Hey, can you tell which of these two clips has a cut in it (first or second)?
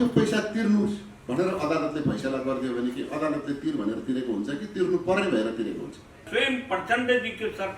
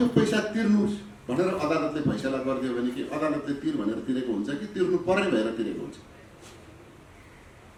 first